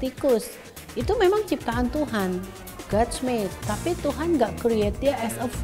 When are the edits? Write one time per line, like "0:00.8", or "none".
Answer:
none